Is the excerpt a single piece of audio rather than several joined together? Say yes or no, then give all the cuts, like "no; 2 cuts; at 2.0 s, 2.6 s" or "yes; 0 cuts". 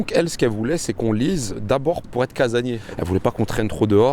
no; 1 cut; at 2.0 s